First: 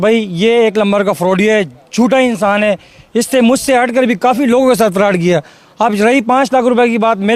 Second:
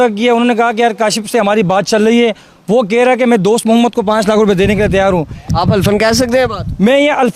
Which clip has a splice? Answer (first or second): second